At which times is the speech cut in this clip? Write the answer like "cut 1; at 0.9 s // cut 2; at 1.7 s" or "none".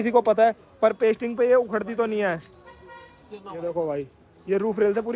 none